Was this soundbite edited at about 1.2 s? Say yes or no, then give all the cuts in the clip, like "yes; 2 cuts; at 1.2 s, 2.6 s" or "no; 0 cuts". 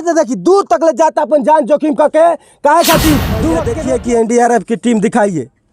no; 1 cut; at 3.7 s